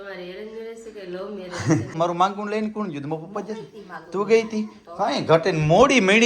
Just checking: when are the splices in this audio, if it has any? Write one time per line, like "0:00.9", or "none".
0:01.9